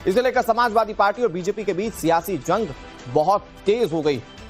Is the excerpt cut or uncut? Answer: uncut